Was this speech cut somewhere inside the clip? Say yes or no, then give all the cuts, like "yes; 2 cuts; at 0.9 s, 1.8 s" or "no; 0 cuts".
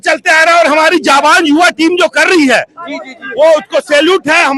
no; 0 cuts